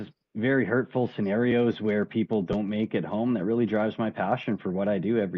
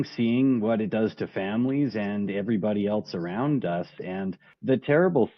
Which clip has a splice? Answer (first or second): second